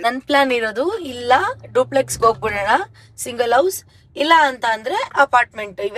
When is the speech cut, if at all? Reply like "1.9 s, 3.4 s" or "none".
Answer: none